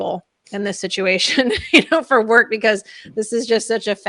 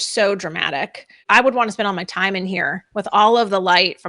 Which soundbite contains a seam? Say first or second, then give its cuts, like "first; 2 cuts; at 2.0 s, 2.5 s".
second; 1 cut; at 1.2 s